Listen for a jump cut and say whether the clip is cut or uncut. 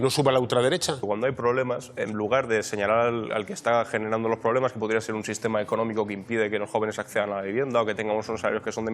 cut